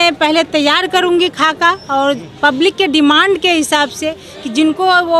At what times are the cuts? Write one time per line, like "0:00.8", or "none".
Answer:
none